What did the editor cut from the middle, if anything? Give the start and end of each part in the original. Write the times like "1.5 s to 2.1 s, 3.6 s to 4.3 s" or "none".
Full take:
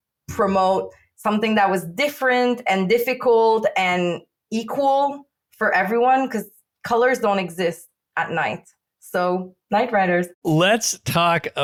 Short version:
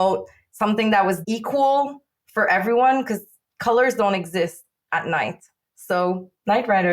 1.9 s to 4.5 s